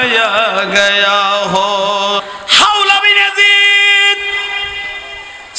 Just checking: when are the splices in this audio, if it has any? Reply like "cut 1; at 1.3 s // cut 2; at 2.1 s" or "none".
cut 1; at 2.2 s